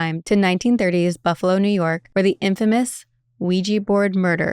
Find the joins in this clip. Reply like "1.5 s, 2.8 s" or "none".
2.0 s